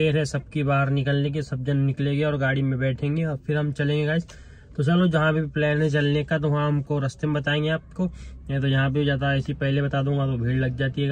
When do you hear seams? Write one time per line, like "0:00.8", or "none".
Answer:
none